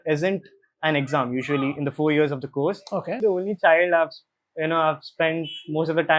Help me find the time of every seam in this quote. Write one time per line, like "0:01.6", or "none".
0:03.2